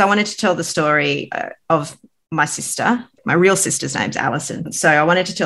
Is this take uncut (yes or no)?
no